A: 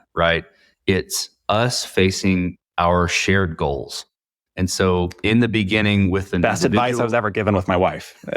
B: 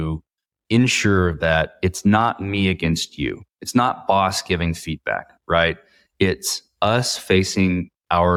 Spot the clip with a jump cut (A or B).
A